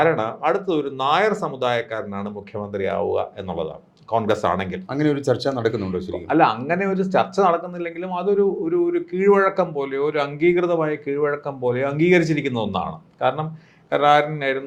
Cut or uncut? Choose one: uncut